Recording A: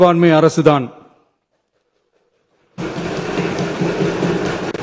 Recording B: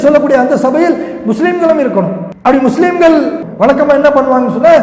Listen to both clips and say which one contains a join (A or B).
B